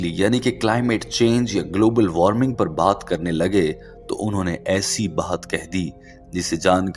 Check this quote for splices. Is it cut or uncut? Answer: uncut